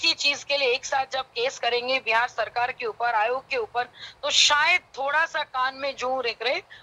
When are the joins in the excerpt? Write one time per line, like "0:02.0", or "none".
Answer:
none